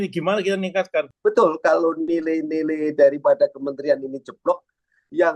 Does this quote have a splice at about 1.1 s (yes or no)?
yes